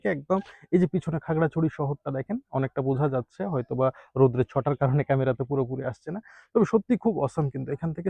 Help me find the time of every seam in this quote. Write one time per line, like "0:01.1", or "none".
none